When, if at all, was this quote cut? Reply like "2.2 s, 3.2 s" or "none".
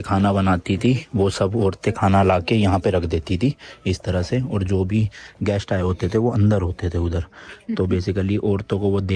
none